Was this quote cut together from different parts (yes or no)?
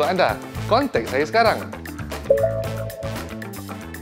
yes